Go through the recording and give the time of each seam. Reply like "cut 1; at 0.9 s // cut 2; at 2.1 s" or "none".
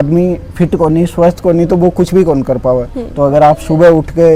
none